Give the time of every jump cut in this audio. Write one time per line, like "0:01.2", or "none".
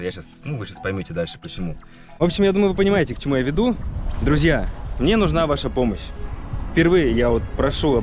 0:02.1